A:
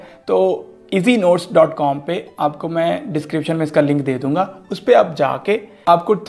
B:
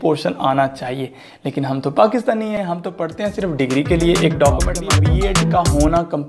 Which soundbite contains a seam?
B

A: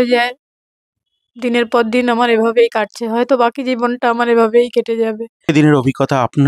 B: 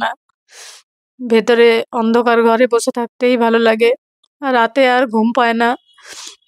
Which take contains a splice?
A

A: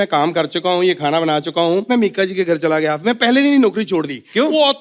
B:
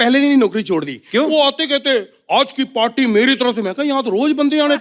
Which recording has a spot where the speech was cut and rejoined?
A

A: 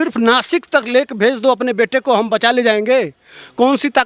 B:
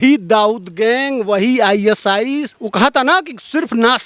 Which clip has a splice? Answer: B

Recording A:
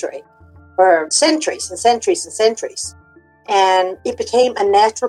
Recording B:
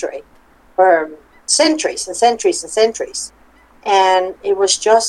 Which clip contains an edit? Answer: A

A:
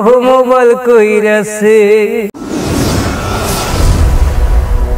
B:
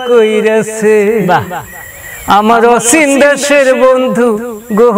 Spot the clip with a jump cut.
A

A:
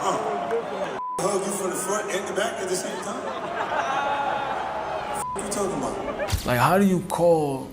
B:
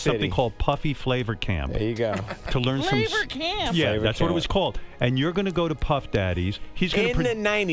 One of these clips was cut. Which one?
A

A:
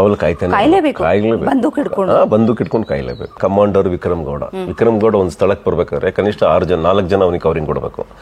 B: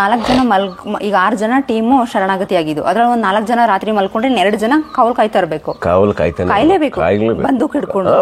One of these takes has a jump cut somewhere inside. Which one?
A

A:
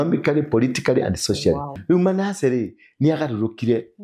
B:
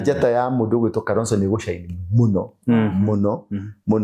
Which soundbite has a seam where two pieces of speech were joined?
A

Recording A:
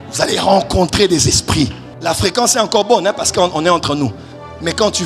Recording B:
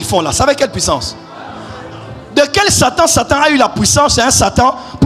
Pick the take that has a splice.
A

